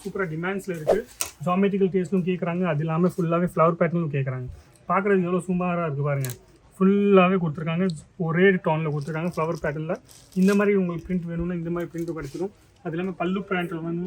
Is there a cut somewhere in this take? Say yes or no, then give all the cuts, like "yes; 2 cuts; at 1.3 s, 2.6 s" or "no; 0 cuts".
no; 0 cuts